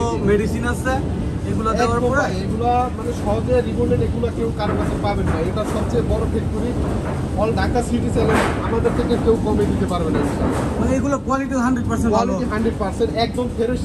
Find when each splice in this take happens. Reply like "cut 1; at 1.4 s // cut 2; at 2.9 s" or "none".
none